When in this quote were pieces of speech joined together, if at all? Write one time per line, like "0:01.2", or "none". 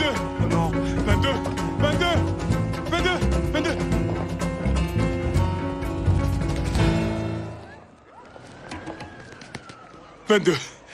none